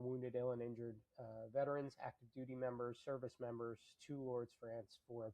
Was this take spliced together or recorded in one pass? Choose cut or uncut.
uncut